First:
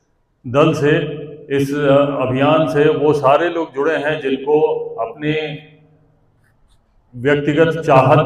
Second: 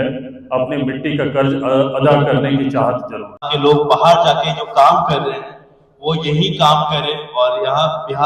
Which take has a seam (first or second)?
second